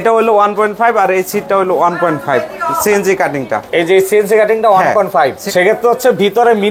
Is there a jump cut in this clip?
no; 0 cuts

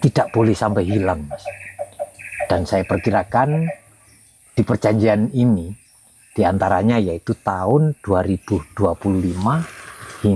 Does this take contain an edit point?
no; 0 cuts

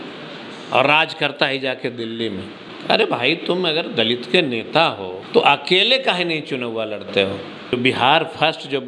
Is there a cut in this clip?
yes; 3 cuts; at 2.6 s, 5.1 s, 7.7 s

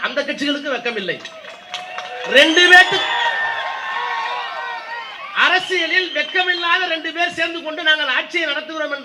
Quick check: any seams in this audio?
no; 0 cuts

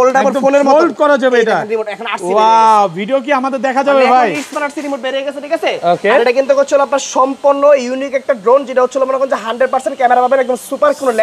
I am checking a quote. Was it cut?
no; 0 cuts

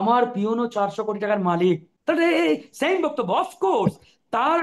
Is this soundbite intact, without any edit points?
no; 1 cut; at 1.9 s

